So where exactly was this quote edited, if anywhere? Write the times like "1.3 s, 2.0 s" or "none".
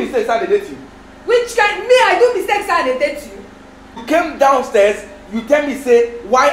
3.9 s